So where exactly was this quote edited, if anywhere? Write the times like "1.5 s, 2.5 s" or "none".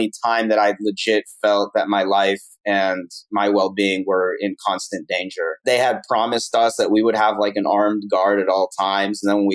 5.5 s